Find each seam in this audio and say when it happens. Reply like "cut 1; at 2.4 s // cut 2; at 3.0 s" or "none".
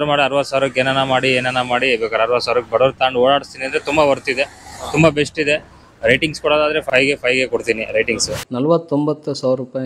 cut 1; at 6.8 s // cut 2; at 8.4 s